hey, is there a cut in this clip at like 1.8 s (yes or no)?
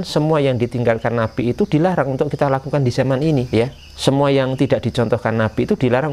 no